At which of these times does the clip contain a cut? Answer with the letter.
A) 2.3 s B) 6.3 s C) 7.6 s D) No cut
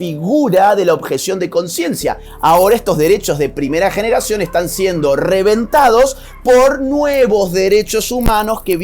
A